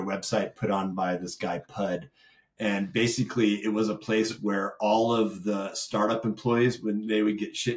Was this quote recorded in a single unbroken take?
yes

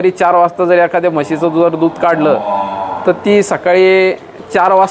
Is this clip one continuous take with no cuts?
yes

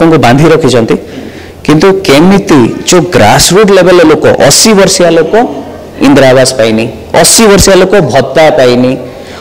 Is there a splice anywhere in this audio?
no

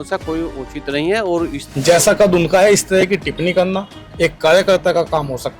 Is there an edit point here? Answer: yes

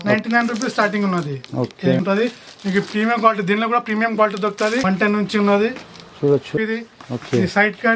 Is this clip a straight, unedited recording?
no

